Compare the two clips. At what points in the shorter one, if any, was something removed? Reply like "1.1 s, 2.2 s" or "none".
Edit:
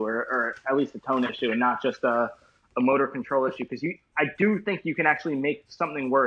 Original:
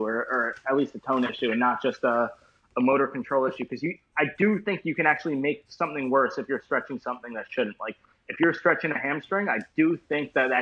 none

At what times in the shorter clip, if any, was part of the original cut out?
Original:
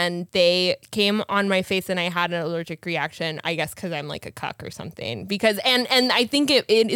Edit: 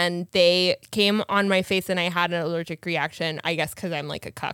none

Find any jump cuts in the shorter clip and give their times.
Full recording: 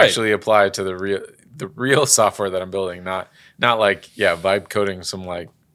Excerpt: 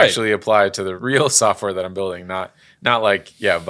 0.9 s

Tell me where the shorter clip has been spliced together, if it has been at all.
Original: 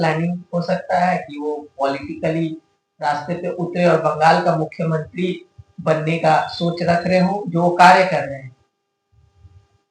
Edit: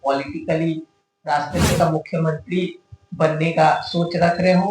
1.8 s

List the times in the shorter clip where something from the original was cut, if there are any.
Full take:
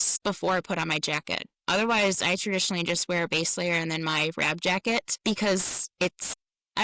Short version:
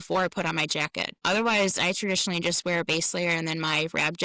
1.1 s

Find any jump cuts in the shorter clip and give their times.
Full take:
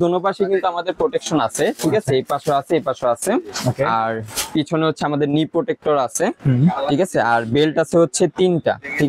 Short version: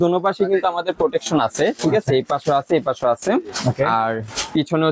none

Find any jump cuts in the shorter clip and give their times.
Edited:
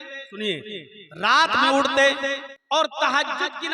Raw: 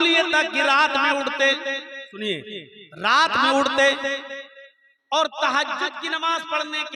2.5 s

